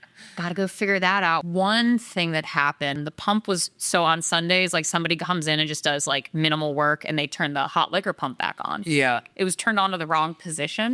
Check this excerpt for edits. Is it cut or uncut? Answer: cut